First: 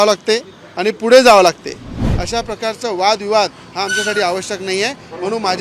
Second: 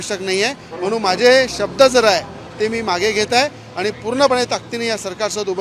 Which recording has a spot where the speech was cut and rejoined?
first; 1 cut; at 2.0 s

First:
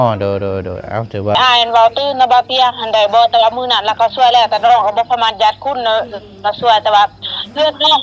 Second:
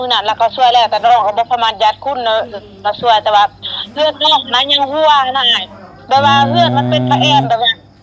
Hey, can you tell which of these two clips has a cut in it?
first; 1 cut; at 1.3 s

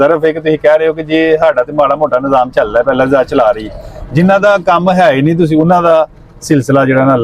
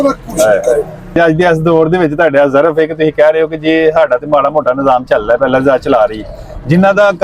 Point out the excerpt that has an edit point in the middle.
second; 1 cut; at 1.2 s

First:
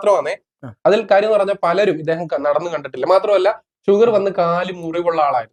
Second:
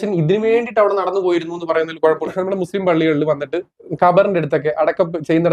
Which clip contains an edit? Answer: second; 2 cuts; at 2.2 s, 3.8 s

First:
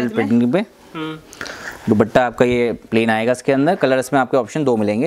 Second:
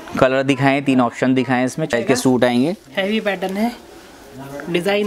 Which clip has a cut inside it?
second; 1 cut; at 1.9 s

